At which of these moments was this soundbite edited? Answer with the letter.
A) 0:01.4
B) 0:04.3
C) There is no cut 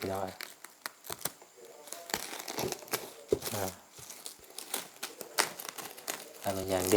C